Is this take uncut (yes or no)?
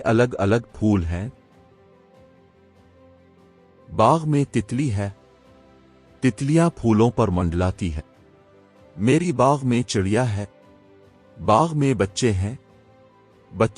no